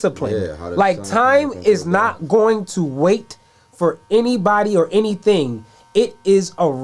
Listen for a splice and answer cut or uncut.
uncut